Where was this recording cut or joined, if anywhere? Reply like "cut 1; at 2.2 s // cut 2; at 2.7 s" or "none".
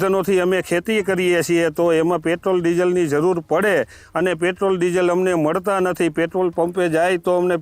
none